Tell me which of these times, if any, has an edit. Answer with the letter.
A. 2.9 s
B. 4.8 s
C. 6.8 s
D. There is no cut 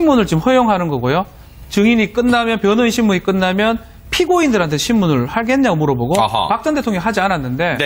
D